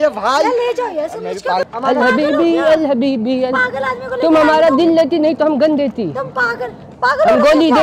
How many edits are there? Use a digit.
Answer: 1